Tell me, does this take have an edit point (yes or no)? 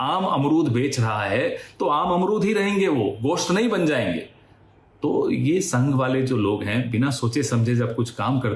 no